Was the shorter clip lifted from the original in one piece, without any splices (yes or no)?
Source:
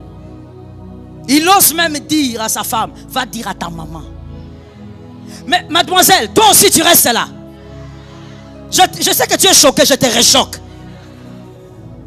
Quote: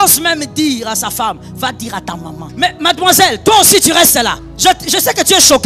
no